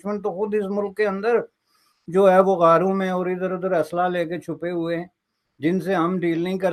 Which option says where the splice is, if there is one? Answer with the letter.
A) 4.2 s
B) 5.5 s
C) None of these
C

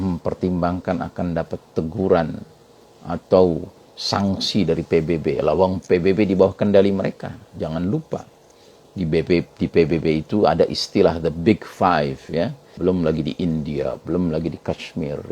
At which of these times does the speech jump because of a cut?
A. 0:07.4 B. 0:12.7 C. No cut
B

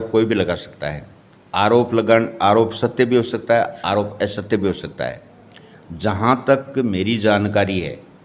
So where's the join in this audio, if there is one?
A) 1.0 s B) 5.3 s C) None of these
C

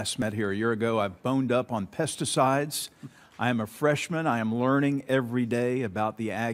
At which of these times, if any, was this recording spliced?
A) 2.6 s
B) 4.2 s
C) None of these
B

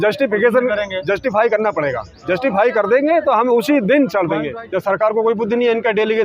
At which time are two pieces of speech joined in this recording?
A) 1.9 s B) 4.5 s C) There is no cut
B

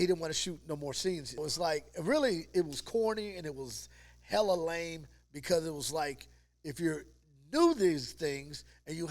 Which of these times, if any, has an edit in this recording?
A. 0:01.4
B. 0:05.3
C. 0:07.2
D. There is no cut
A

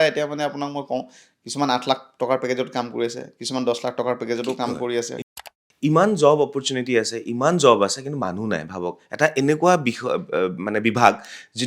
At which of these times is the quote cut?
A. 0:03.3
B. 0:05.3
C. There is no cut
B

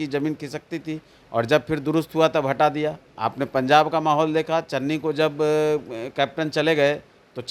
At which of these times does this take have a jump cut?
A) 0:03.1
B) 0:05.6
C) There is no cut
A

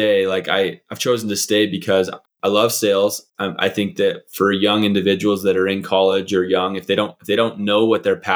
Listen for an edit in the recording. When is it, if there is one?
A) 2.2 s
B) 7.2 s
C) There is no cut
A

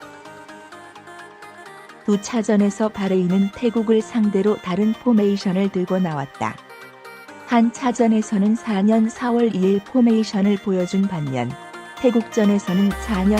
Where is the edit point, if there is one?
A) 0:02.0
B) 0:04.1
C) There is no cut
A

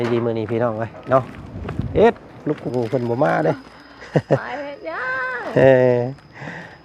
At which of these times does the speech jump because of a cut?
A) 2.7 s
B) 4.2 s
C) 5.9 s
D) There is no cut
A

